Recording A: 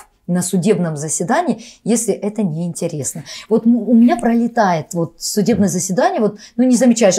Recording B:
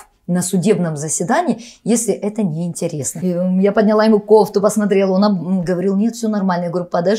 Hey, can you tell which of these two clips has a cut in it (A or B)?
B